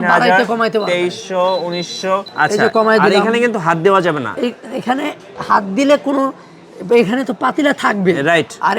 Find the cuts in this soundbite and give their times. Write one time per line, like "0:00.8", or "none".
0:02.3